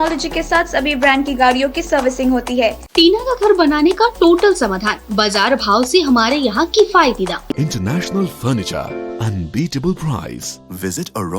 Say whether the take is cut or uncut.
cut